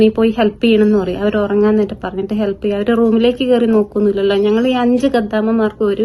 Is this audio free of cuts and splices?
yes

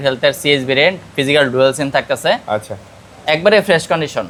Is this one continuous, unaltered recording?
yes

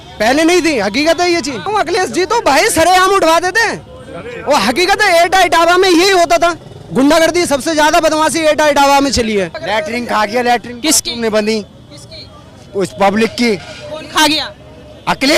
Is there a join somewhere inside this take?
yes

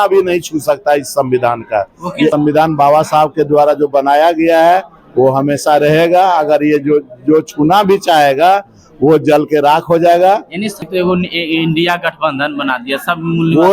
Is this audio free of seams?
no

